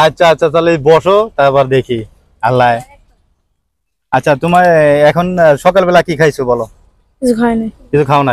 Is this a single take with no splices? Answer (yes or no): yes